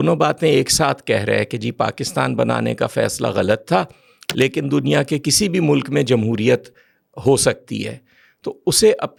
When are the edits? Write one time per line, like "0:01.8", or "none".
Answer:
none